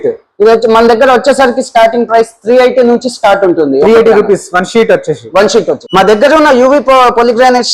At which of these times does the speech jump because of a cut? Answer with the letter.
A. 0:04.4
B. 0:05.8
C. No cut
B